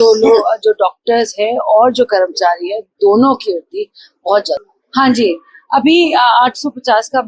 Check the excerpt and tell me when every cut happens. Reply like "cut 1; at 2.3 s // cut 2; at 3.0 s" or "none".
cut 1; at 4.7 s